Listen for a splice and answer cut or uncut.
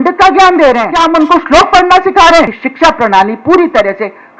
cut